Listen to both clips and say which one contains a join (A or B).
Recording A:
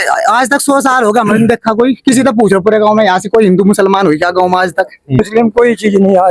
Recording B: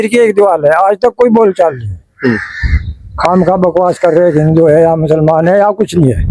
A